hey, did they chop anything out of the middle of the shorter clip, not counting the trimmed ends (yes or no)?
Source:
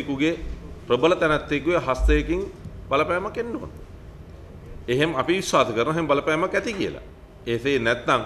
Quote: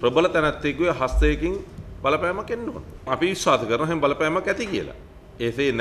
yes